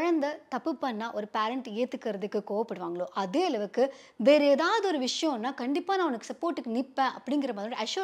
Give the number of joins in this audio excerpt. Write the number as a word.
zero